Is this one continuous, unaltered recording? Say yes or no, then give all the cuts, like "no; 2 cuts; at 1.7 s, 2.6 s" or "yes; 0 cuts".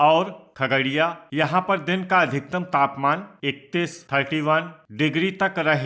no; 3 cuts; at 0.9 s, 3.3 s, 4.8 s